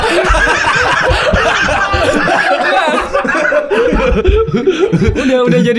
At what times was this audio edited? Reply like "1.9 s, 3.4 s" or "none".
none

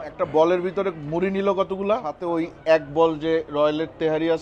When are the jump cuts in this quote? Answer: 2.2 s

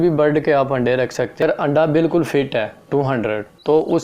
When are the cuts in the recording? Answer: 1.4 s

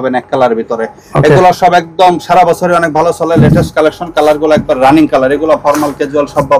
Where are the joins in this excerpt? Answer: none

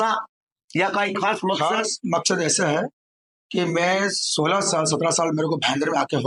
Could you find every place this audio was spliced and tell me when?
none

